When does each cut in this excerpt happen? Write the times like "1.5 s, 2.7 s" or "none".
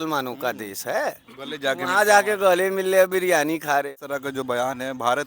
3.9 s